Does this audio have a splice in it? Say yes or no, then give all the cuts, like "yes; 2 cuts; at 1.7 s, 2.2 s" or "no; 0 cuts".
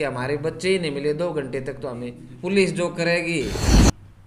yes; 1 cut; at 2.2 s